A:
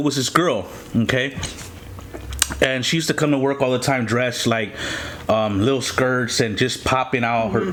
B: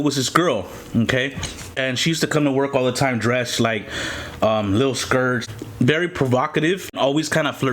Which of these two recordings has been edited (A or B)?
B